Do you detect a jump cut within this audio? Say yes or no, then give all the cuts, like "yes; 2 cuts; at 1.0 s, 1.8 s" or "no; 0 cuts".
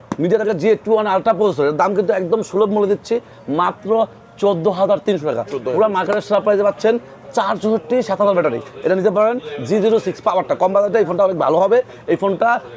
no; 0 cuts